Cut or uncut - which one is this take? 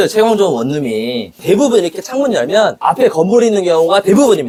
uncut